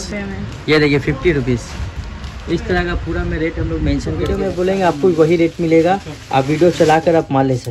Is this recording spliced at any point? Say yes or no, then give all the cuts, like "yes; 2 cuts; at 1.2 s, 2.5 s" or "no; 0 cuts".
yes; 1 cut; at 4.4 s